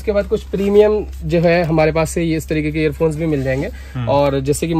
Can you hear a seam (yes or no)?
no